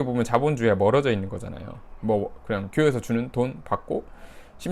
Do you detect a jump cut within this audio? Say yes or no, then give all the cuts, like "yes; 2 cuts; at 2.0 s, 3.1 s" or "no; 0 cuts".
no; 0 cuts